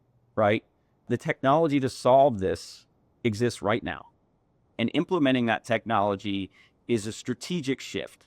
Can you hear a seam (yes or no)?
yes